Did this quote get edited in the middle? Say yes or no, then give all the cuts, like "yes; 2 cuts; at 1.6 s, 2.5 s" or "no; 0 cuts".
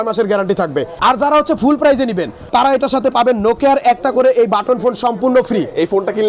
yes; 2 cuts; at 0.9 s, 2.4 s